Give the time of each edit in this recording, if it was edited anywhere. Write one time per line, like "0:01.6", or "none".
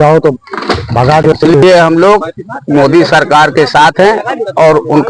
0:01.4